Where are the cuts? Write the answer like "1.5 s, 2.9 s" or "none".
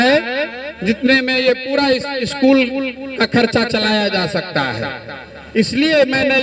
none